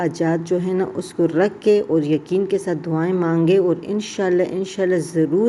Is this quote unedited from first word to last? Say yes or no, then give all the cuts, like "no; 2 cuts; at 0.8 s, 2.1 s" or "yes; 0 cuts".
yes; 0 cuts